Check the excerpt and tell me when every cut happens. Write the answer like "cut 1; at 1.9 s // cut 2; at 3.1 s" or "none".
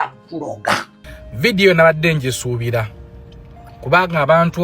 cut 1; at 1.0 s